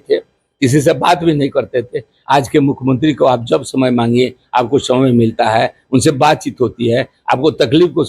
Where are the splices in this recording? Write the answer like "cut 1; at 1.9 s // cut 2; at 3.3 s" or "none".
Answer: none